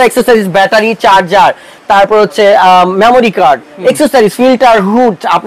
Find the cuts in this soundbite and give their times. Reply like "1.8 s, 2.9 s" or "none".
none